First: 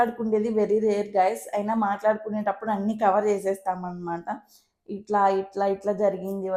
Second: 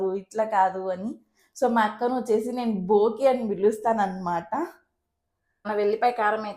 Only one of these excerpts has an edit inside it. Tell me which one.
second; 1 cut; at 5.5 s

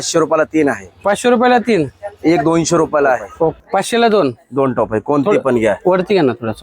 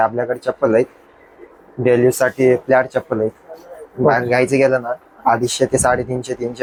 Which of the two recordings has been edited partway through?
first; 1 cut; at 3.6 s

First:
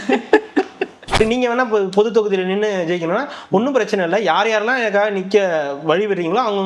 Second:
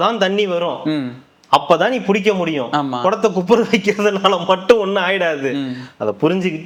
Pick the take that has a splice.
first; 1 cut; at 1.2 s

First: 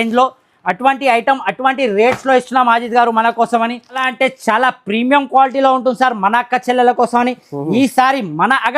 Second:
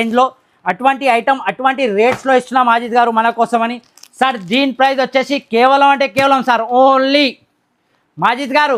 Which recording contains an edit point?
first; 1 cut; at 4.1 s

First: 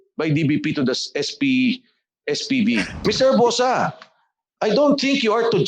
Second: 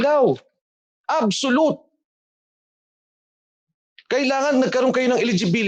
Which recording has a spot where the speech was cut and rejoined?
first; 1 cut; at 3.0 s

